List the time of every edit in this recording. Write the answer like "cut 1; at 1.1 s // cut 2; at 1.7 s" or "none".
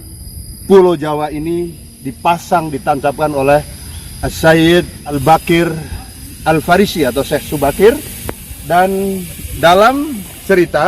cut 1; at 5.2 s